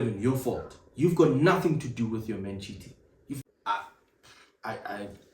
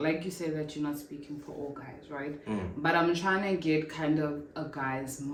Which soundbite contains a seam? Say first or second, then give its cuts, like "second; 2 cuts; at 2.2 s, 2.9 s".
first; 1 cut; at 3.2 s